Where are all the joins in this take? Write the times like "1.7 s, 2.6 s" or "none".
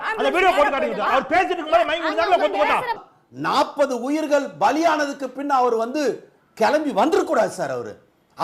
3.0 s